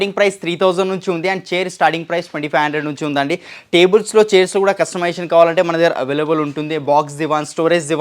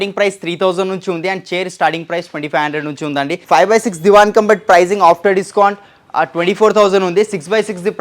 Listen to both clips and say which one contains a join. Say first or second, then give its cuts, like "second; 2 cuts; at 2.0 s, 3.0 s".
second; 1 cut; at 3.4 s